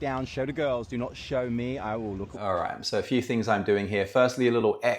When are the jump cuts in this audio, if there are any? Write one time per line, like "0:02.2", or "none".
none

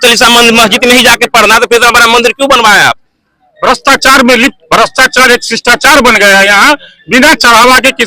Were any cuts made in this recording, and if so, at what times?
0:03.5

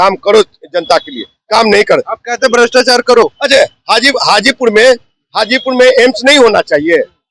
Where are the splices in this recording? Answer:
none

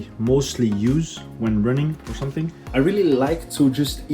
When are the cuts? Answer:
0:02.6

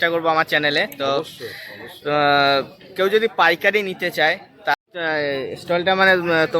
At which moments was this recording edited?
0:04.7

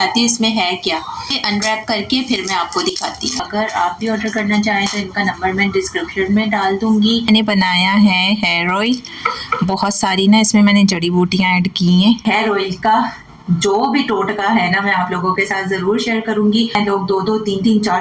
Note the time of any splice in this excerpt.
0:01.4
0:03.4
0:07.3
0:12.2
0:16.8

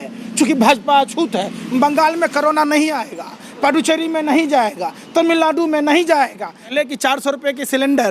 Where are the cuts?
0:06.7

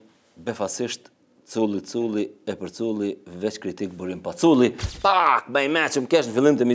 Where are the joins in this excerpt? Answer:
0:04.9

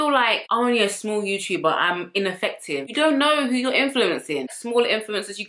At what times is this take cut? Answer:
0:02.8
0:04.6

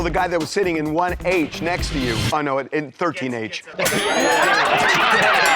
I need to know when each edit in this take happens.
none

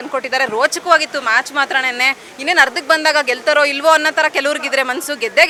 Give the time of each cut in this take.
none

